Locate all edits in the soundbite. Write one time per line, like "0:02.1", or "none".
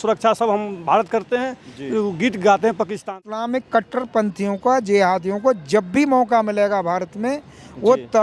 0:03.0